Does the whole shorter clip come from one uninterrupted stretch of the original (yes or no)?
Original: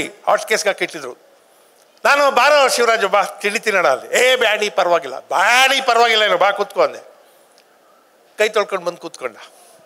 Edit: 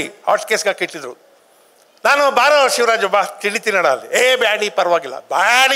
yes